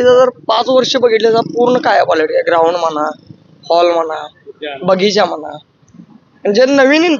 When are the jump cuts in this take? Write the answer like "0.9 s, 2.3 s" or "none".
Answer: none

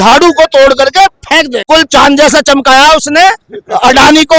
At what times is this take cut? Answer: 1.7 s

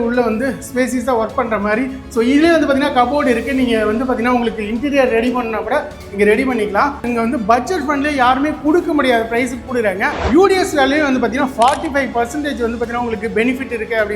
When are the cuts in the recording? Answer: 7.0 s, 10.2 s

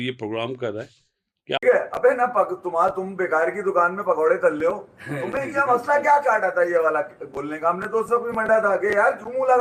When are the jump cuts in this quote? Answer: 1.6 s

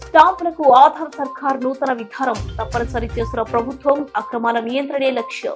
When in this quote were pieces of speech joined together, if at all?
none

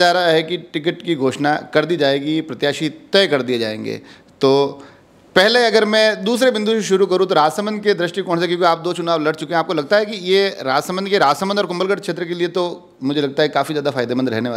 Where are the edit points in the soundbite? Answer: none

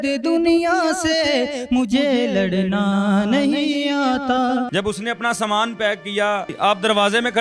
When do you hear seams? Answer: 4.7 s, 6.5 s

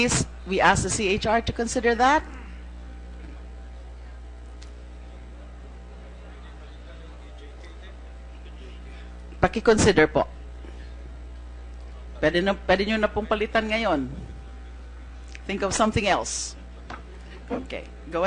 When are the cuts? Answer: 5.4 s

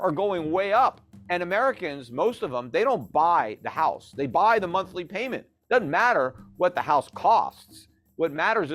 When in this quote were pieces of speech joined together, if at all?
1.1 s

